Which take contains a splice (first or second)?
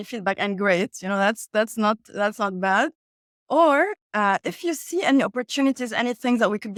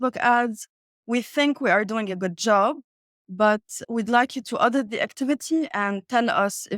second